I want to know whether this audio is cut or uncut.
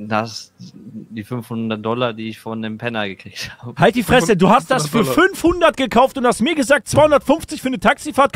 uncut